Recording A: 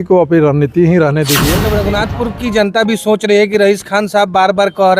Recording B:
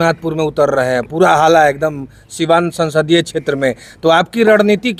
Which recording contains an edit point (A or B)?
A